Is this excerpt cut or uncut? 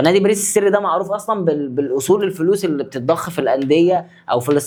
uncut